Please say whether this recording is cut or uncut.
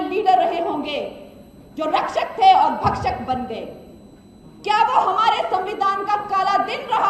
uncut